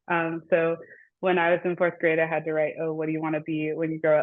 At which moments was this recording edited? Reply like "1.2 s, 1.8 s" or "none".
none